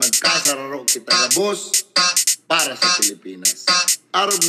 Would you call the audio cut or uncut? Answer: uncut